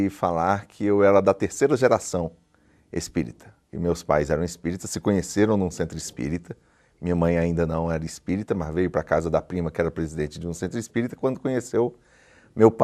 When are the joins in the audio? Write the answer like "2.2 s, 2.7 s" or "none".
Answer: 6.2 s